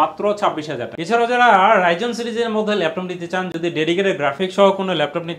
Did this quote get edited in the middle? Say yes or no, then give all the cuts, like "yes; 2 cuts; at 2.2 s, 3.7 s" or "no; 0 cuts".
no; 0 cuts